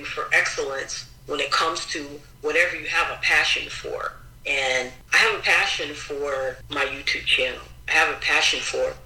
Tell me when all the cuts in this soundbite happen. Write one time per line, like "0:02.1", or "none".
0:05.0
0:06.6